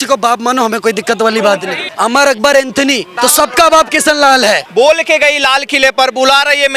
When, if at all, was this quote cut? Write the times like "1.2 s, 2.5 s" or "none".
1.8 s, 3.1 s, 4.6 s